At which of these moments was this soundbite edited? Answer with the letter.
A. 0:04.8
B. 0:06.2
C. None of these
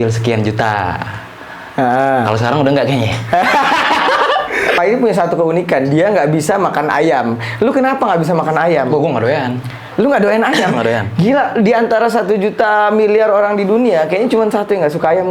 A